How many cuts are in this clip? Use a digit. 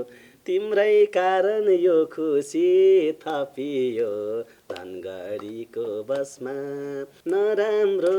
1